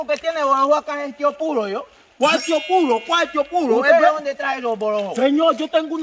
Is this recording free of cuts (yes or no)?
yes